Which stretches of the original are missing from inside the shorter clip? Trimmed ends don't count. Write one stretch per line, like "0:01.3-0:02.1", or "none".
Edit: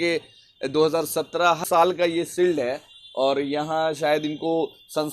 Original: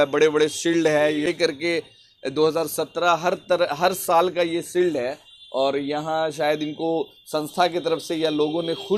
0:03.2-0:04.0